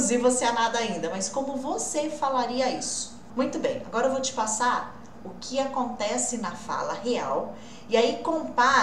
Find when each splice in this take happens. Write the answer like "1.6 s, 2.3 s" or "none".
3.2 s